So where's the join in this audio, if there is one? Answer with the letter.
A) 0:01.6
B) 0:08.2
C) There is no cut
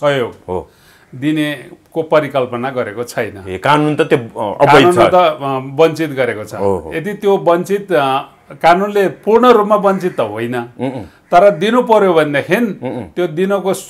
C